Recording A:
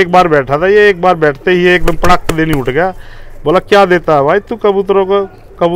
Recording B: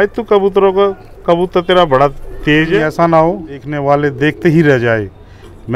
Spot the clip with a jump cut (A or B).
B